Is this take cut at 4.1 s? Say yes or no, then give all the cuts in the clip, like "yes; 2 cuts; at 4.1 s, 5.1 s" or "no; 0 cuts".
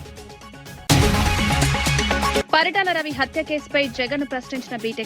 no; 2 cuts; at 0.9 s, 2.4 s